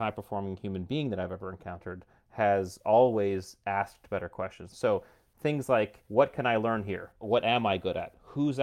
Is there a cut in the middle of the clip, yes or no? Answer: yes